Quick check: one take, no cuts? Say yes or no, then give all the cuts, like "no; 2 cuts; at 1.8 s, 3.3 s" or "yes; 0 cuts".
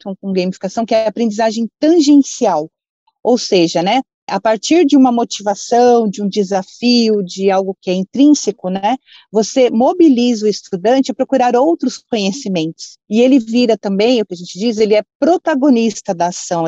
no; 2 cuts; at 12.9 s, 15.1 s